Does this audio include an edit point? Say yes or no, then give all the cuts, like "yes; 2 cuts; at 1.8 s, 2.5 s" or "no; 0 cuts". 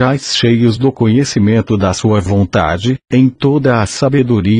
yes; 1 cut; at 2.0 s